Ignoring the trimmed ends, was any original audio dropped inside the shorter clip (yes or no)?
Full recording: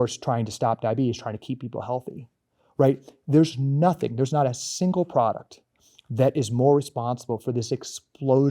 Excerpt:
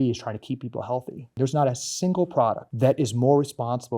yes